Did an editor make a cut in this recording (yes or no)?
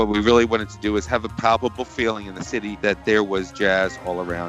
no